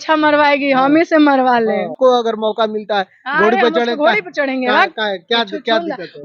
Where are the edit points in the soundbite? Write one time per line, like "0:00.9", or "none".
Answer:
0:01.9